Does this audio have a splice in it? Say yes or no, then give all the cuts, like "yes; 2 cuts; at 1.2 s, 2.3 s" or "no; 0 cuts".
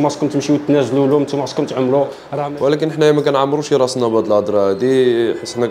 yes; 1 cut; at 2.3 s